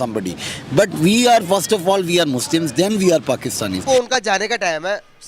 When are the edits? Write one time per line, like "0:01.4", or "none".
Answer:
0:03.8